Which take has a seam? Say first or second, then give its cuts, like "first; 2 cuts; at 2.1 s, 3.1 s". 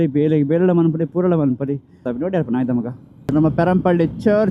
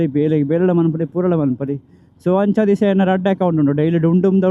first; 2 cuts; at 2.1 s, 3.3 s